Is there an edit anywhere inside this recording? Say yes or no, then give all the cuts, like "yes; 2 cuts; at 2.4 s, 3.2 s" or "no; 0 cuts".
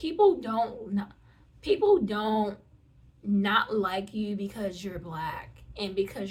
no; 0 cuts